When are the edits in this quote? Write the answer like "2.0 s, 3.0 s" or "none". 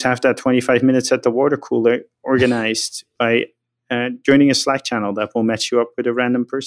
none